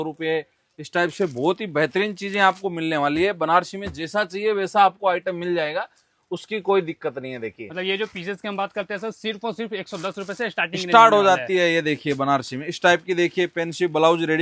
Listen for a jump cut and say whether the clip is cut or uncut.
uncut